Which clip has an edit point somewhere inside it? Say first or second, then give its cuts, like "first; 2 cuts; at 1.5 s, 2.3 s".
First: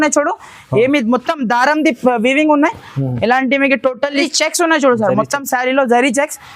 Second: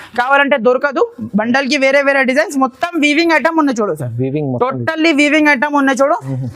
first; 1 cut; at 4.3 s